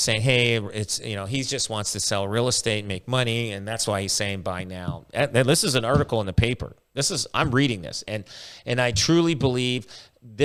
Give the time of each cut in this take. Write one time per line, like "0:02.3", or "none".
none